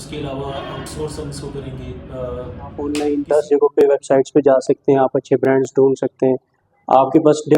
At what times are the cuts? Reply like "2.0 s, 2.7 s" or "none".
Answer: 2.9 s